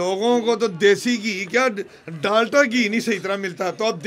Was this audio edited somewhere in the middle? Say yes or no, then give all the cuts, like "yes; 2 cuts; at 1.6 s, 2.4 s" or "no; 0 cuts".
no; 0 cuts